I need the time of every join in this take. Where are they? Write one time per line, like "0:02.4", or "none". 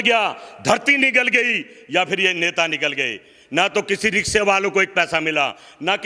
none